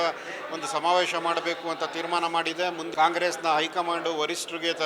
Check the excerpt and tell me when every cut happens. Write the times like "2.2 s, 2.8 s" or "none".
2.8 s